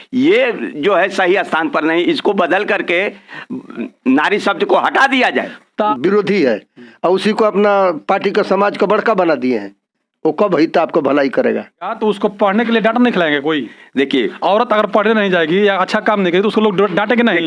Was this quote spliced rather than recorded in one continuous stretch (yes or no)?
yes